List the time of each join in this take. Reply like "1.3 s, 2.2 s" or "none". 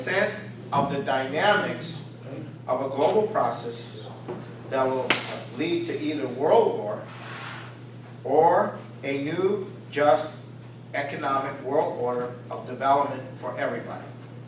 6.9 s